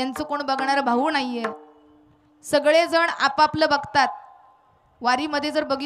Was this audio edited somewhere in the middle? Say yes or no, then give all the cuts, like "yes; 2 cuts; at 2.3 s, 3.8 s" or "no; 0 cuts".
no; 0 cuts